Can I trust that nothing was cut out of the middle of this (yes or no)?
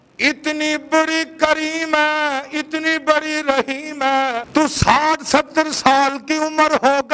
no